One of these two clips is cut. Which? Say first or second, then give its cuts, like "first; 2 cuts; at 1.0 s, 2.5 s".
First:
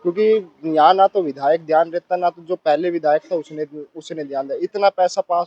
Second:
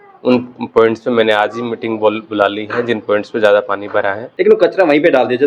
second; 1 cut; at 4.2 s